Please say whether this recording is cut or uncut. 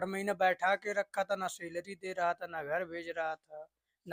uncut